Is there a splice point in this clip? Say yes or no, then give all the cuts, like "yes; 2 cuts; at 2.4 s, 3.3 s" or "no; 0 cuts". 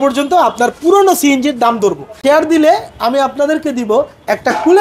yes; 1 cut; at 2.1 s